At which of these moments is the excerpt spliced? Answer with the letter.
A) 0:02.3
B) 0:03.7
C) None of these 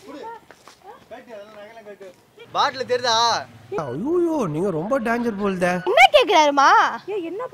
A